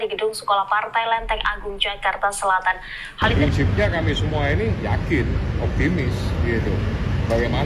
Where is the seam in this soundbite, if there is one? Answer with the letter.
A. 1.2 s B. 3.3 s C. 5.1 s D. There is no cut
B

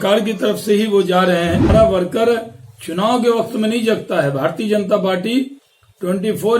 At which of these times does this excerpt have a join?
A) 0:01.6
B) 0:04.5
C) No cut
A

